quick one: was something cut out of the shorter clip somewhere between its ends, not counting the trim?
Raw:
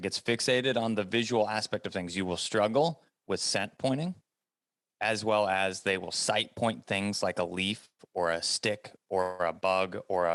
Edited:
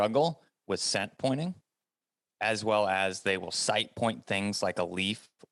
no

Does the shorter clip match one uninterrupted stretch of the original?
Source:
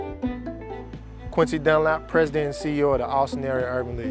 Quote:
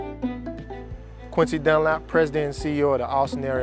yes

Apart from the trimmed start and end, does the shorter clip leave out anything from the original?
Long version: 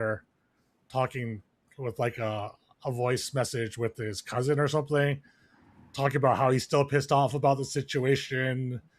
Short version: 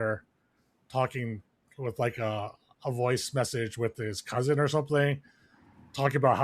no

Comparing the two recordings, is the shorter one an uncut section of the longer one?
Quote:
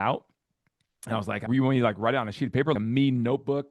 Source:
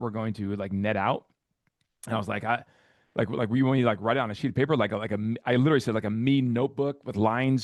no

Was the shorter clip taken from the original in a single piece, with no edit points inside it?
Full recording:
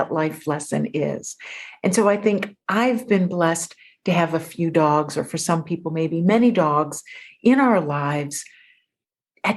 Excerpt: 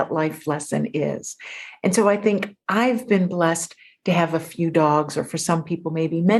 yes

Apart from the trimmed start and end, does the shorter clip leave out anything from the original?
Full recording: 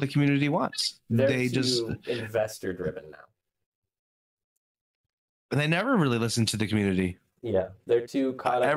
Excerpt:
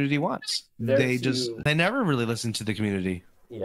yes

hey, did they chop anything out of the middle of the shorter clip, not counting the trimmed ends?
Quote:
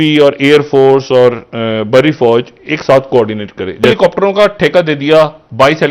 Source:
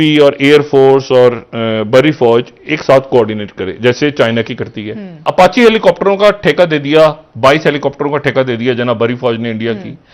yes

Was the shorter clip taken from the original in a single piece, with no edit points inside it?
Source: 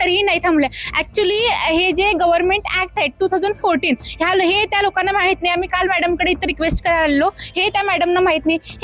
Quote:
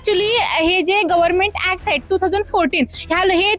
yes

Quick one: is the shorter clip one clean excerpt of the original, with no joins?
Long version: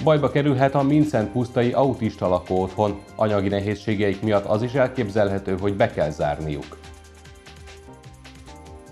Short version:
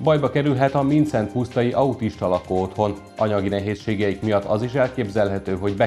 yes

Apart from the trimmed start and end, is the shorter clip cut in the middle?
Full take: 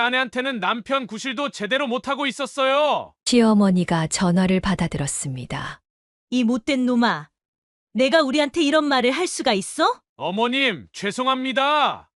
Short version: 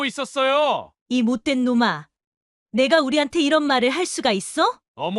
yes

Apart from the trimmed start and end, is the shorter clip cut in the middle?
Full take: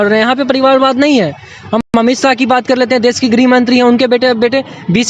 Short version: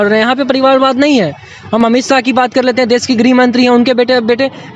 yes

